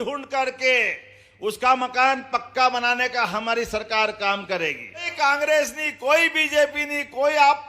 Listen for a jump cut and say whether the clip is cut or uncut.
cut